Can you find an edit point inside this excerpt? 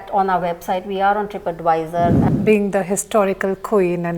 yes; 1 cut; at 2.2 s

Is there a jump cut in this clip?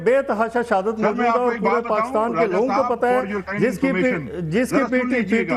no; 0 cuts

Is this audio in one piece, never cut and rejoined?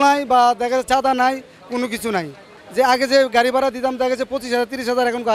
no; 1 cut; at 2.5 s

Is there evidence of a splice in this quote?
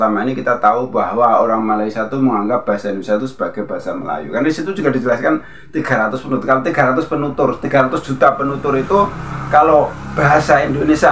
no; 0 cuts

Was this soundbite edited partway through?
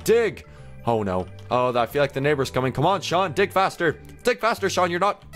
no; 0 cuts

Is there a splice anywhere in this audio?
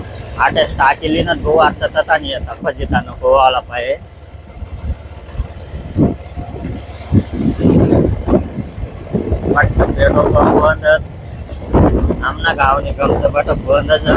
no; 0 cuts

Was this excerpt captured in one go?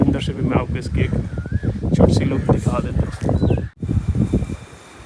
no; 1 cut; at 3.8 s

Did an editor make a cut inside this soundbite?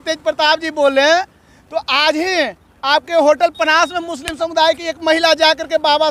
no; 0 cuts

